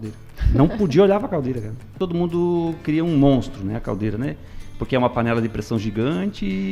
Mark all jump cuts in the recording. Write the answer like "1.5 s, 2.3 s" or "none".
1.9 s